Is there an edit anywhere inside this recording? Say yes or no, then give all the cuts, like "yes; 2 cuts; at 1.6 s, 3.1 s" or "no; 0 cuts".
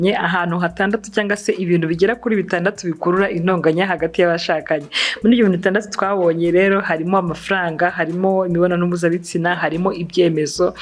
no; 0 cuts